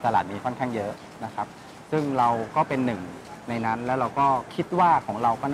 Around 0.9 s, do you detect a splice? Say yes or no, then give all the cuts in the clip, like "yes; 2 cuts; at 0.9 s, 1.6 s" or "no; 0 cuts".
no; 1 cut; at 4.5 s